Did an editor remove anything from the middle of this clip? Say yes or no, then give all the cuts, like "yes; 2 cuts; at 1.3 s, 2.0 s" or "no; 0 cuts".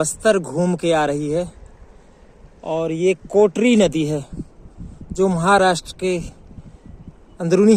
no; 0 cuts